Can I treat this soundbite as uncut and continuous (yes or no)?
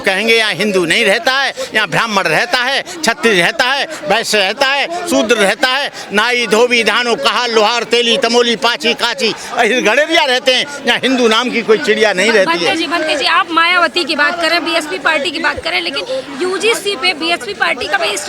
yes